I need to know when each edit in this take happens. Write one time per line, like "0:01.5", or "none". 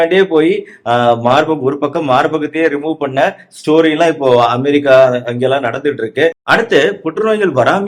0:06.4